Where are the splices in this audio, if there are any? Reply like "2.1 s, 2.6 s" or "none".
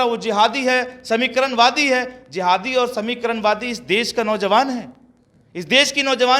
none